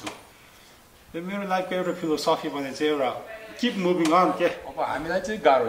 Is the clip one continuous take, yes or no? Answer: no